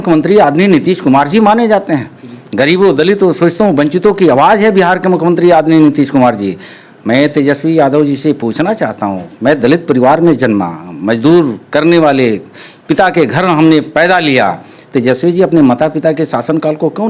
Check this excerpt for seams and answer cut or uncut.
uncut